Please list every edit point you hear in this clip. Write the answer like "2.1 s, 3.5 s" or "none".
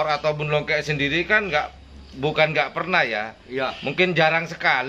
none